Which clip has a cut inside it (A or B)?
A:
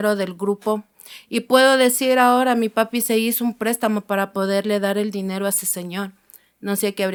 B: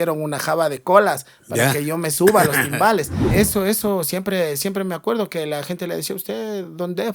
B